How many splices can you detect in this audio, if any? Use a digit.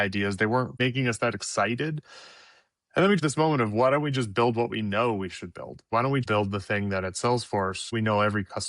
4